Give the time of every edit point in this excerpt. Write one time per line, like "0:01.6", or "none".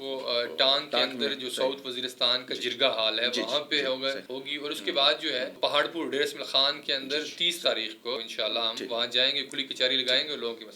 0:04.3
0:05.5
0:08.2

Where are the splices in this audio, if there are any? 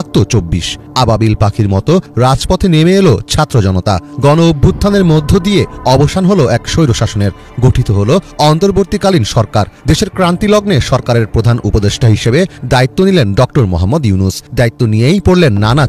none

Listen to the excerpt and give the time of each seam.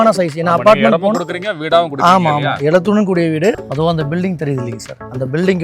0:03.6

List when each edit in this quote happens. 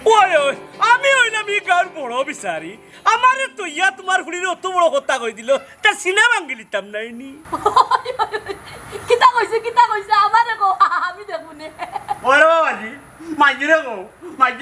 none

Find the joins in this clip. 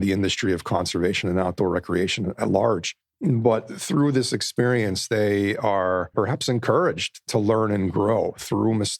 0:06.1

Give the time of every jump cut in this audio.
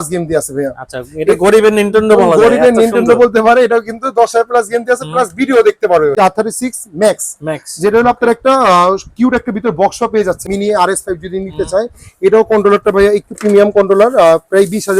0:06.1
0:10.4

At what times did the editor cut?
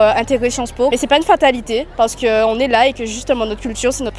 none

